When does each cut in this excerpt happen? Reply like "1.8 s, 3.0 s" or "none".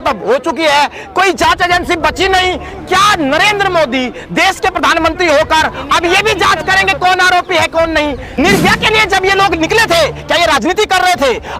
8.3 s